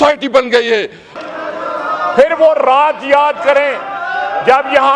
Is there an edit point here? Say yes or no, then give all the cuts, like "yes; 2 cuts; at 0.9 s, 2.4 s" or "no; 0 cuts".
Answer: yes; 1 cut; at 1.1 s